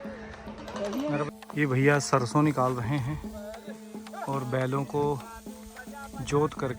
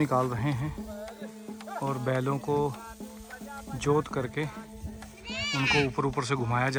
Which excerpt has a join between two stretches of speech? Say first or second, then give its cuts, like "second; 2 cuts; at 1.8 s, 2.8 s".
first; 1 cut; at 1.3 s